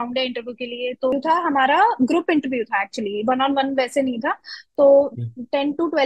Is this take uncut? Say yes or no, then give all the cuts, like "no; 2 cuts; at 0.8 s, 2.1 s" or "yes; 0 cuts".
no; 1 cut; at 1.1 s